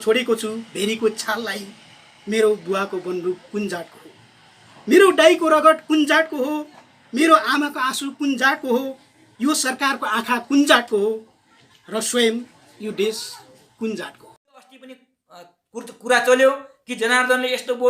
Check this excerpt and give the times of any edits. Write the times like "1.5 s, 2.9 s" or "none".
14.9 s